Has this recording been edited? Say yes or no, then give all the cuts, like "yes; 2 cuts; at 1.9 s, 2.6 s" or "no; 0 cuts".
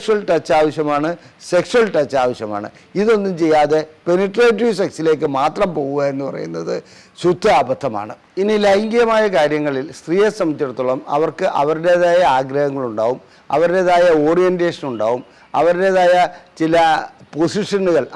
no; 0 cuts